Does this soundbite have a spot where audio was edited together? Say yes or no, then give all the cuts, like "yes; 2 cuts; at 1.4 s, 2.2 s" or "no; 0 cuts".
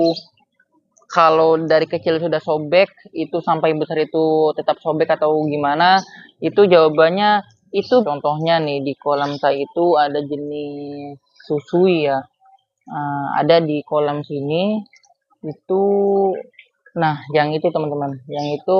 yes; 1 cut; at 8.0 s